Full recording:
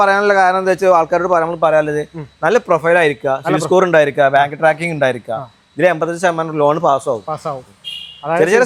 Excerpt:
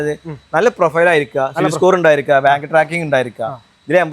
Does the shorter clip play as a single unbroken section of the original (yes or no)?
yes